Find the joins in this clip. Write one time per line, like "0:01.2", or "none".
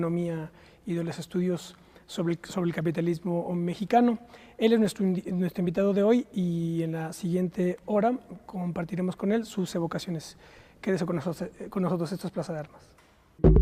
none